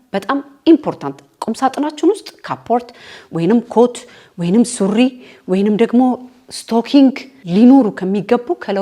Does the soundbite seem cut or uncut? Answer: cut